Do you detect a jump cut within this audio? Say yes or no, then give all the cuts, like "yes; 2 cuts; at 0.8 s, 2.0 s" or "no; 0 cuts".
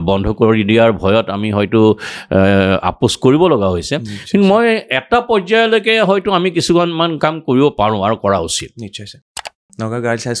yes; 1 cut; at 9.5 s